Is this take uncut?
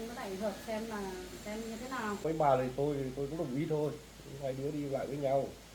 no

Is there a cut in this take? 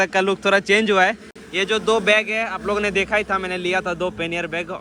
no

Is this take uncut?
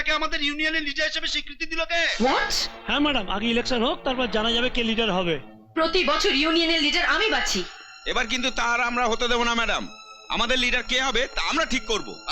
yes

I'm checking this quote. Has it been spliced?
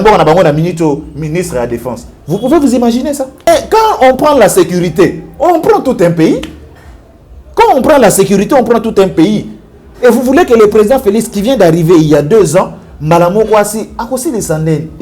yes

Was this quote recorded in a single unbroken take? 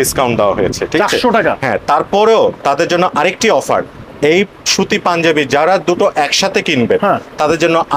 yes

